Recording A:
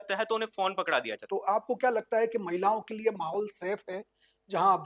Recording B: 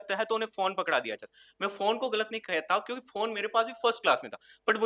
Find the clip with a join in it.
A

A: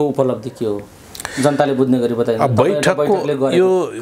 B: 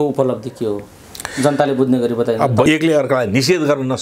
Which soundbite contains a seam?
B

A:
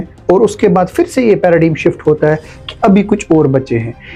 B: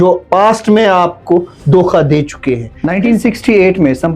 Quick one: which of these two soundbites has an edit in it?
B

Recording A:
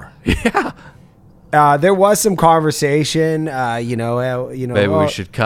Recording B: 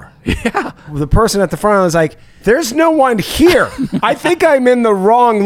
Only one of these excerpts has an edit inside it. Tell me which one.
B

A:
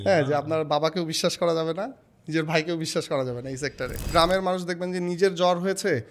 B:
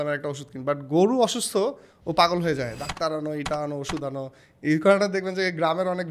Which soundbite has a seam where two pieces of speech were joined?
A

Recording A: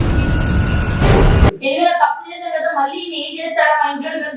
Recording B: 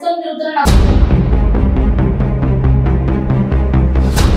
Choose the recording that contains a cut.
A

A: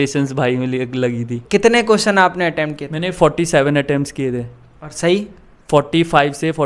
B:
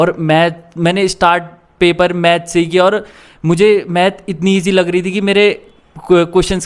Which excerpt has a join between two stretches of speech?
A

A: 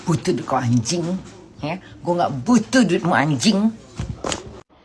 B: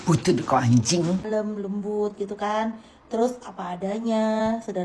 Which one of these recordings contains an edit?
B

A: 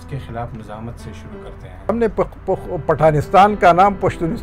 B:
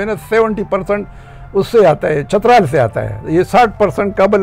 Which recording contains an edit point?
A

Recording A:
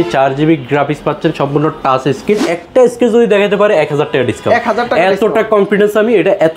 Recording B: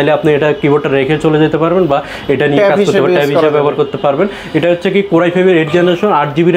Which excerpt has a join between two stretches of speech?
A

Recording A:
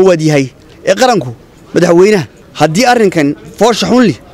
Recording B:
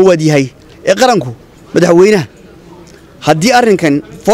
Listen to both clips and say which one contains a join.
A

